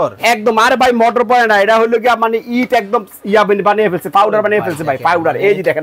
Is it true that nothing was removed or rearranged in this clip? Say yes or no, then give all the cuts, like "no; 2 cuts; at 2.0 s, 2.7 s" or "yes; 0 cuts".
yes; 0 cuts